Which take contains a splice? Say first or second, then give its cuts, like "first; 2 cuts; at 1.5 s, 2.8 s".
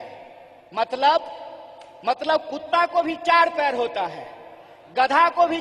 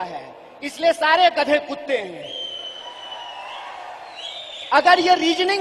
second; 1 cut; at 3.4 s